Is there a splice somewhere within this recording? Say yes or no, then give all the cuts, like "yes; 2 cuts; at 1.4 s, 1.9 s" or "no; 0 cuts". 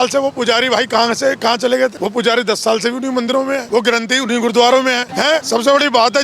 yes; 3 cuts; at 2.0 s, 3.6 s, 5.3 s